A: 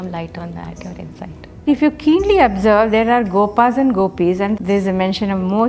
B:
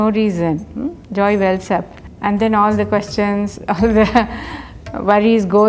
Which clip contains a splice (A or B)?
A